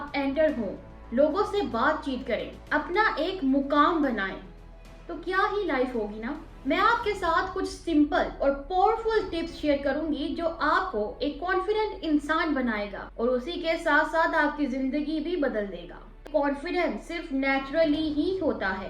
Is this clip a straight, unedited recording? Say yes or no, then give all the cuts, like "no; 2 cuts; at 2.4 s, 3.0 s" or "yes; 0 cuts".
no; 3 cuts; at 6.5 s, 13.0 s, 16.2 s